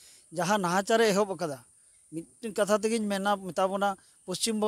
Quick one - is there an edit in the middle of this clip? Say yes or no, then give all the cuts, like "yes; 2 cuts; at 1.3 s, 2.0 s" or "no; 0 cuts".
no; 0 cuts